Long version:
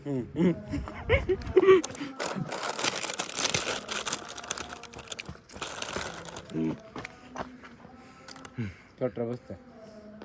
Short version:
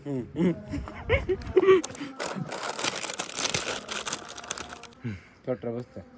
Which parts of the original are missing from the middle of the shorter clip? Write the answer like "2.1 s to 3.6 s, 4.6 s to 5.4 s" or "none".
4.9 s to 8.4 s

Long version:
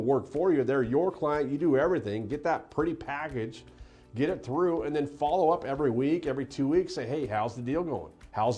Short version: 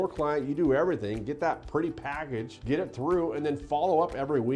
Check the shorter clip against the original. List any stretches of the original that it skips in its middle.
3.6 s to 4.0 s

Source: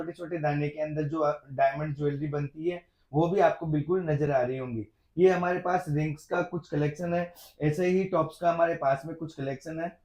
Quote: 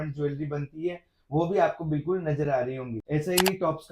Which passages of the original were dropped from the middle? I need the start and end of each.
4.7 s to 7.4 s

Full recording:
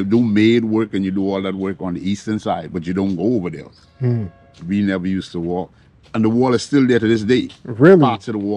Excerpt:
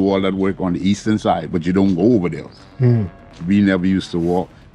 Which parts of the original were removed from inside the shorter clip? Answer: none

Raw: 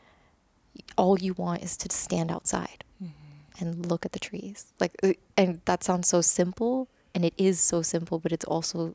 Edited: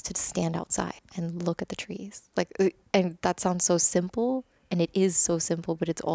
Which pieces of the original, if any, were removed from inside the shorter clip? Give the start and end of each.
2.8 s to 3.5 s

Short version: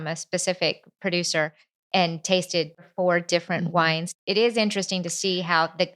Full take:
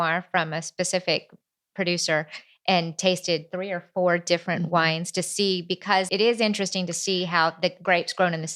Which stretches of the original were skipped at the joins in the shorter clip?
1.3 s to 1.6 s, 3.5 s to 3.8 s, 5.2 s to 6.1 s

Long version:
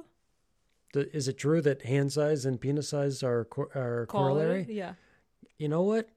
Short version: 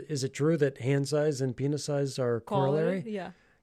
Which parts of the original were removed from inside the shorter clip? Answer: 3.5 s to 4.1 s

